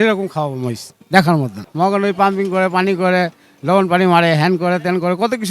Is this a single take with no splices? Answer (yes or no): no